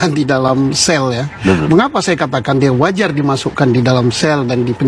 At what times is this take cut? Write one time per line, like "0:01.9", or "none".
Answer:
0:01.3

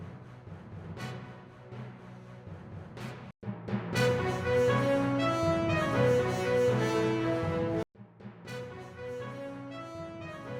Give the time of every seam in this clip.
none

